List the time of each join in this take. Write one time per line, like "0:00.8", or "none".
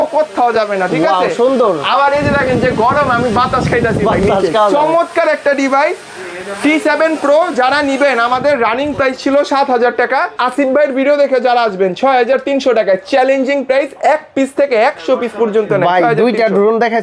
none